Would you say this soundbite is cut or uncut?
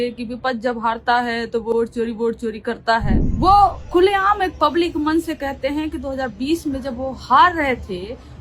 cut